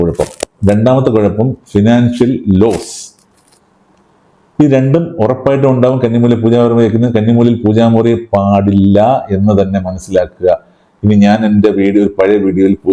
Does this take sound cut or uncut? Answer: uncut